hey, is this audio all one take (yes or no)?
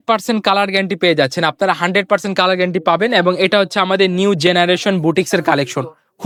yes